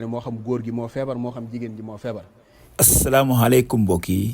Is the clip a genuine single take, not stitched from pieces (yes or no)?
no